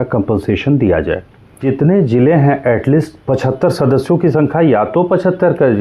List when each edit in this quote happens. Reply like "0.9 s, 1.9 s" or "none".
1.6 s